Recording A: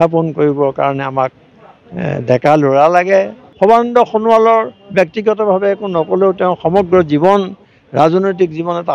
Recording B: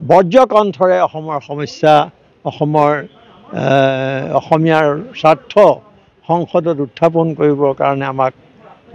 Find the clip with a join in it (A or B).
A